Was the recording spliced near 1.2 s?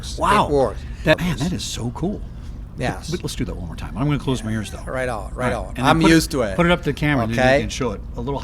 yes; 1 cut; at 1.2 s

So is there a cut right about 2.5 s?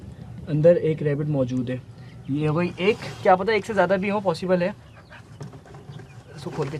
no; 0 cuts

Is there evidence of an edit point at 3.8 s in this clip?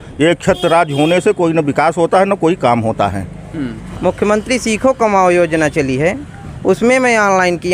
yes; 1 cut; at 3.8 s

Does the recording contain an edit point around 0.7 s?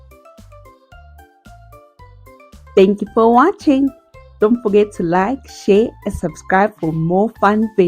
no; 0 cuts

